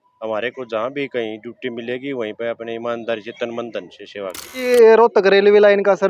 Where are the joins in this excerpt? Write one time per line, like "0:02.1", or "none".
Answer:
0:04.7